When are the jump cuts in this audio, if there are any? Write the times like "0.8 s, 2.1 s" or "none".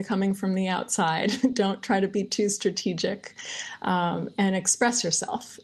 none